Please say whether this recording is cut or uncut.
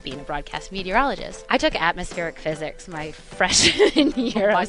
cut